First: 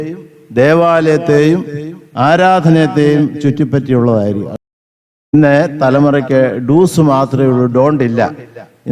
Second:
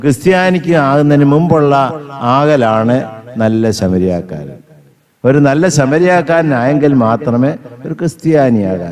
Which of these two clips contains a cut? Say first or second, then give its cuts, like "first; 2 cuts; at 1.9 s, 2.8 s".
first; 1 cut; at 4.6 s